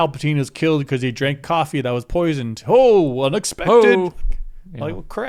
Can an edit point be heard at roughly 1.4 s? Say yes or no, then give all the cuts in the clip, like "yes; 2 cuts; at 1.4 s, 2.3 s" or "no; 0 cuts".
no; 0 cuts